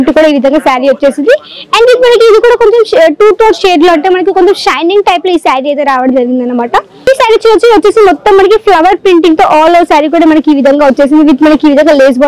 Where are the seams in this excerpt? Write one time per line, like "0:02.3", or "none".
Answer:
0:07.1